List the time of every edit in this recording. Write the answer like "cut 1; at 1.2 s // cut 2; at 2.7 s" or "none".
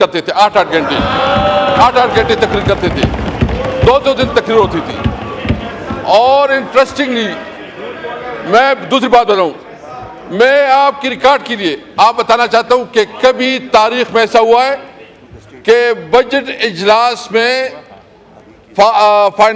none